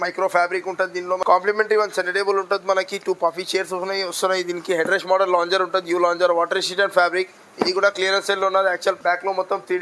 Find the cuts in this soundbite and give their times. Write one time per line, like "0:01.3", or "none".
0:01.2
0:09.0